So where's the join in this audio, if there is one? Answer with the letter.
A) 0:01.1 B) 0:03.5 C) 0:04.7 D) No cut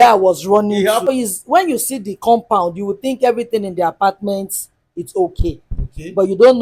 A